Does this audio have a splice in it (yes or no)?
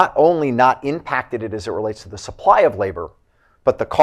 no